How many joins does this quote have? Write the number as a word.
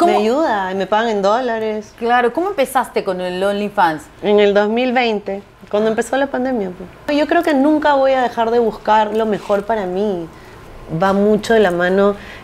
two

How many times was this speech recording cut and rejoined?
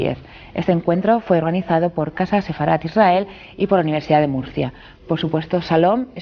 one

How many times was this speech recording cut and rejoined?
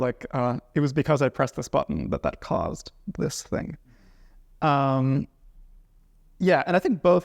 zero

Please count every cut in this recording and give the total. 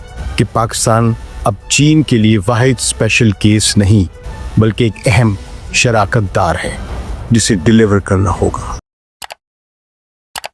zero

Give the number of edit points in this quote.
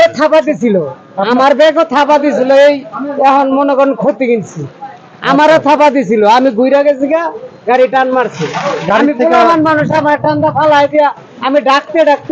zero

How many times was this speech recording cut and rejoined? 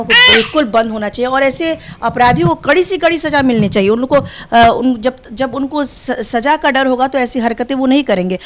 zero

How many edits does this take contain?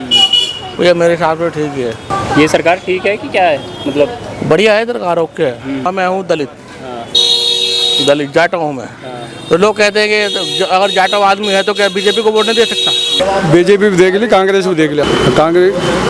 four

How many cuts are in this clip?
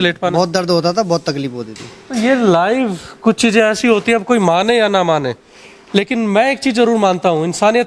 zero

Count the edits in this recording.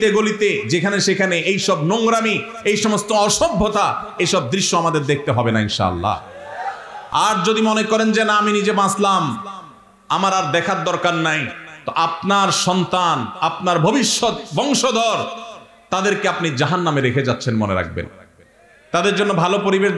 zero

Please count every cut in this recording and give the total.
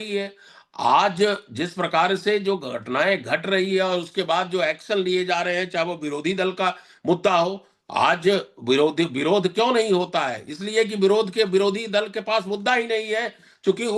zero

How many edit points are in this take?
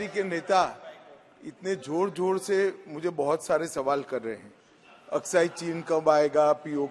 zero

